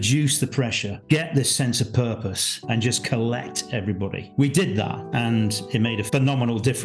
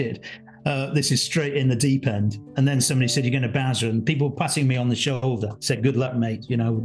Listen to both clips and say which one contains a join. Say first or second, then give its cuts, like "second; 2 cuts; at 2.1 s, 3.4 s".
first; 5 cuts; at 0.9 s, 2.5 s, 4.2 s, 5.0 s, 6.0 s